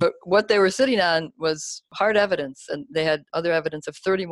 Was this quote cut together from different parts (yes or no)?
yes